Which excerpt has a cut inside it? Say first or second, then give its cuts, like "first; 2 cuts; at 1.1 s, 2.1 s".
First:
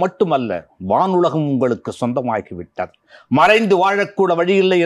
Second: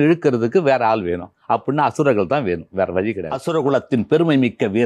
second; 1 cut; at 3.3 s